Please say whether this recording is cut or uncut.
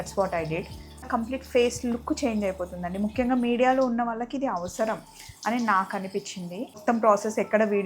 cut